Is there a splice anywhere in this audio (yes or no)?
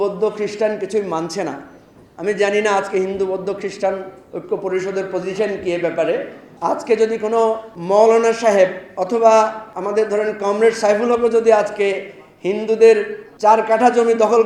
yes